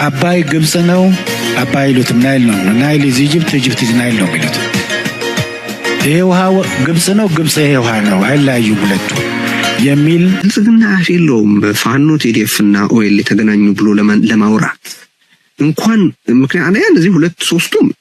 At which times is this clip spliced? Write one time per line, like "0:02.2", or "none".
0:10.4

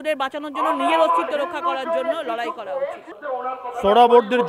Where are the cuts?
0:03.1

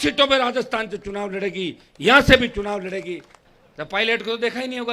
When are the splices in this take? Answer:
0:03.3

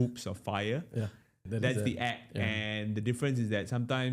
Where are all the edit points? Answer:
0:01.4

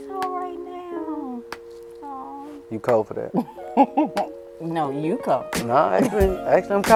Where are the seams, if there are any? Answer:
none

